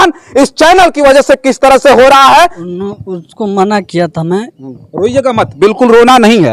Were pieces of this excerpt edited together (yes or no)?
yes